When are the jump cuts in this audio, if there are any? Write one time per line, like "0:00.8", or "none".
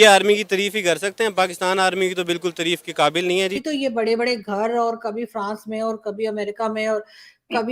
0:03.6